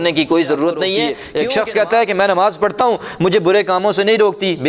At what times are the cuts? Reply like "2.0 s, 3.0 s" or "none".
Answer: 1.2 s

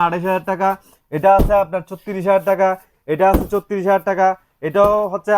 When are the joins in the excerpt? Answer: none

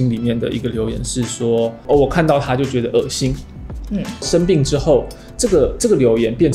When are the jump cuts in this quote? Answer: none

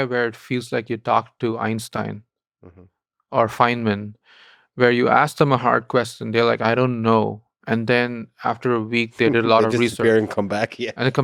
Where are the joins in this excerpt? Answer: none

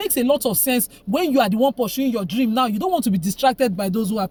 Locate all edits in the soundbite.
none

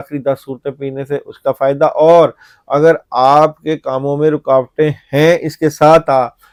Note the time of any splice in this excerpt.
none

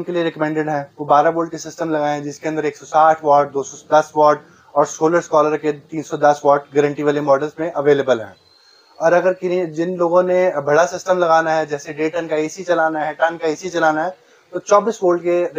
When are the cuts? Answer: none

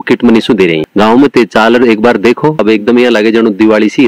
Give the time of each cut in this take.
0.8 s, 2.6 s

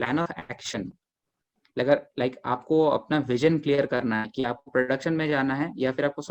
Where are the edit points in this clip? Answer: none

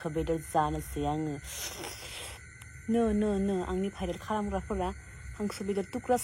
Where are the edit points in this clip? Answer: none

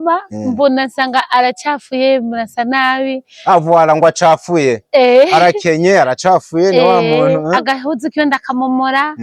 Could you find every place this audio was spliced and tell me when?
none

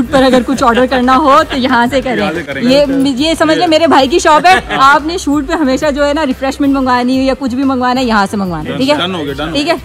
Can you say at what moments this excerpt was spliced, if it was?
none

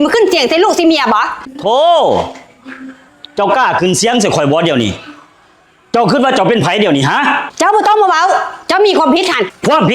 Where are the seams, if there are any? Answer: 1.4 s

